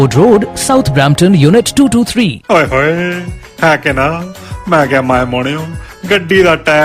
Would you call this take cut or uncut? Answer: cut